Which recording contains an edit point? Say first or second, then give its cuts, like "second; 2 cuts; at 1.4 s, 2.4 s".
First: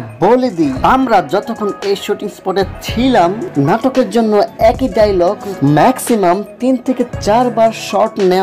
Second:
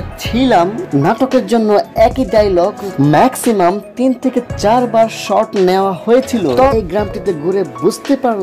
second; 1 cut; at 6.7 s